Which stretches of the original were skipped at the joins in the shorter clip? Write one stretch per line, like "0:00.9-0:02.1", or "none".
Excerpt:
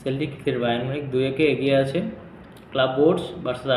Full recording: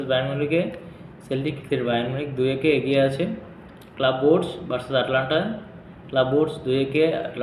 none